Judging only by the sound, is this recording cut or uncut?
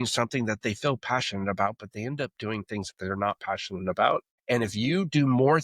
cut